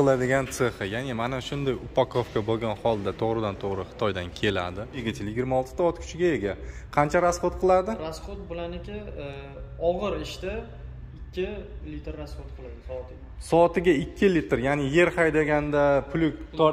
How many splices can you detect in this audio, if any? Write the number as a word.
one